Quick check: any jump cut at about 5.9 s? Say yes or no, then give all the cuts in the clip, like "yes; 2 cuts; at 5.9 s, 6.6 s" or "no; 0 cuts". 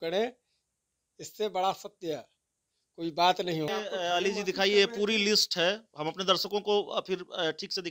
no; 1 cut; at 3.7 s